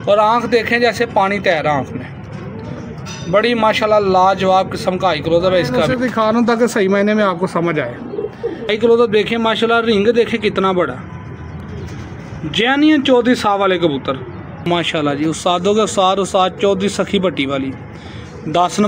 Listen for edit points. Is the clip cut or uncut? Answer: cut